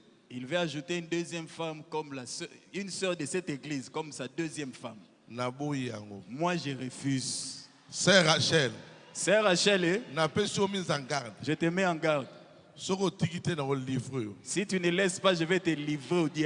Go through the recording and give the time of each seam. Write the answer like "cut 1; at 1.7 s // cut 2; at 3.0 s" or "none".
none